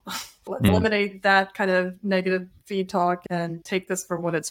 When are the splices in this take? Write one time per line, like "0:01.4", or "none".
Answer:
0:00.7
0:03.2